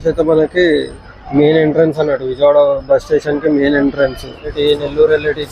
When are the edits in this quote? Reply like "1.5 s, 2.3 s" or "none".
4.5 s